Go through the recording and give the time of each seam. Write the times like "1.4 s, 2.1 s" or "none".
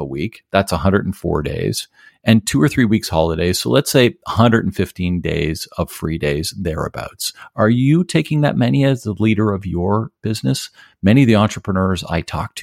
10.2 s